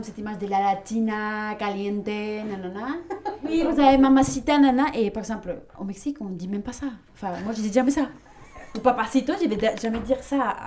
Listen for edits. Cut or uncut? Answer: cut